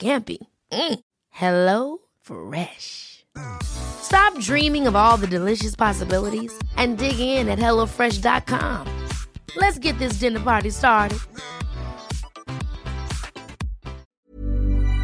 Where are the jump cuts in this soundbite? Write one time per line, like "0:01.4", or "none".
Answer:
0:14.1